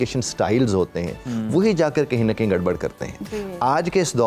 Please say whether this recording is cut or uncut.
uncut